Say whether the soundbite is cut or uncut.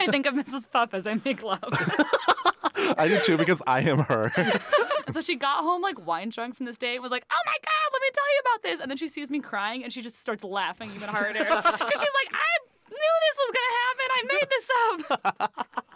cut